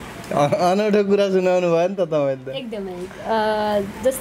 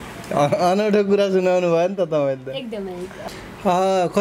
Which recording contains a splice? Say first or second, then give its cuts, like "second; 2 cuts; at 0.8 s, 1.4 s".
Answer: second; 1 cut; at 3.1 s